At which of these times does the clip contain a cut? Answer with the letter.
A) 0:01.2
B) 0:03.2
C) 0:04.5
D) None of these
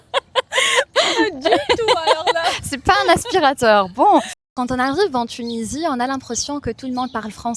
C